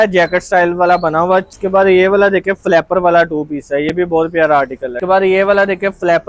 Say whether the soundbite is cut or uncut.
cut